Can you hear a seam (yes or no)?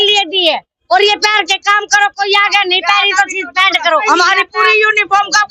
yes